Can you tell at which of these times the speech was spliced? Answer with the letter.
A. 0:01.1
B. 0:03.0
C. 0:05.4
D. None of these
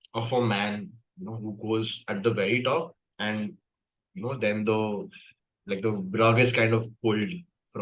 B